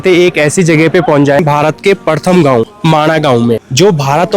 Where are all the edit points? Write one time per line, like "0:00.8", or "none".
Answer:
0:01.4